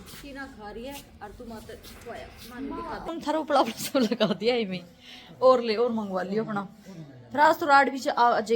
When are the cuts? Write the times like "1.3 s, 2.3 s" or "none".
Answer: 3.1 s